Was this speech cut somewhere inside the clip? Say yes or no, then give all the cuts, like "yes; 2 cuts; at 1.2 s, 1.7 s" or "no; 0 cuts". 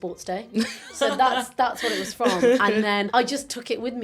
yes; 1 cut; at 3.1 s